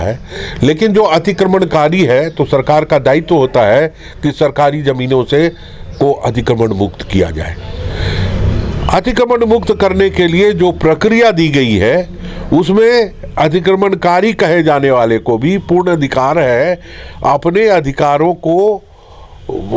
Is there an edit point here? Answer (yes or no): no